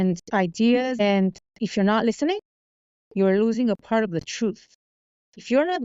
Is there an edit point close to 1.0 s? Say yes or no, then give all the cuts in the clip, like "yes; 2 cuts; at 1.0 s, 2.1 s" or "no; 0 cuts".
yes; 1 cut; at 1.0 s